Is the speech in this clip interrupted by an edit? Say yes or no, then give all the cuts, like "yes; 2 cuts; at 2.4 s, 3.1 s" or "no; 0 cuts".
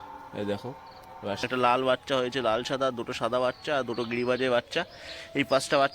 yes; 1 cut; at 1.4 s